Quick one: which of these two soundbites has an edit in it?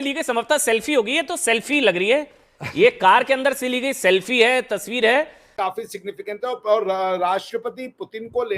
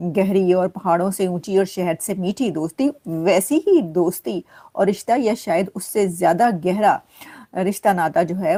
first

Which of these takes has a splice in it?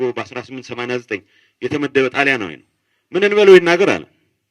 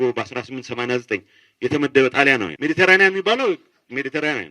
second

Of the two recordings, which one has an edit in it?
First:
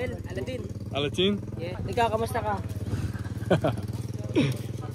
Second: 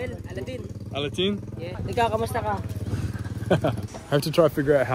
second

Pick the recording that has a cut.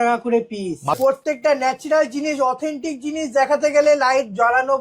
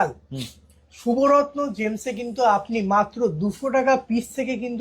first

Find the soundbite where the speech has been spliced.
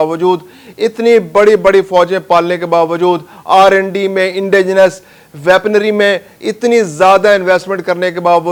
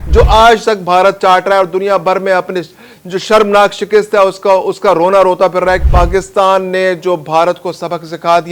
second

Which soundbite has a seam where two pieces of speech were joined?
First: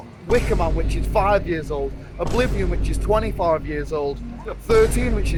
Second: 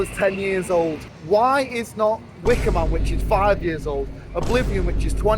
second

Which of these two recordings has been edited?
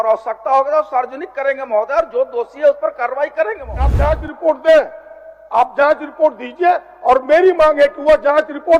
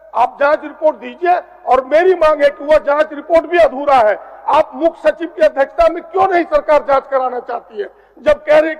first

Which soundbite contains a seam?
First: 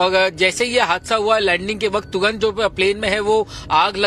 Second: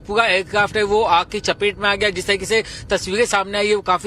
first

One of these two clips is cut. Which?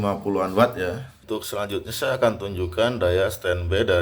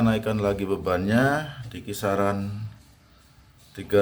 first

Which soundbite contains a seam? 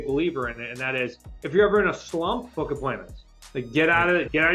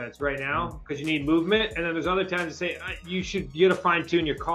first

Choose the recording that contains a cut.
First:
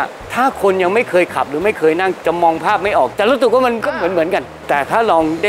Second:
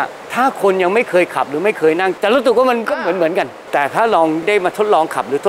second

